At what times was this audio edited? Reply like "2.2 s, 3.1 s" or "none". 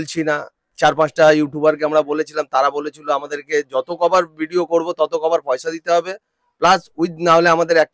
none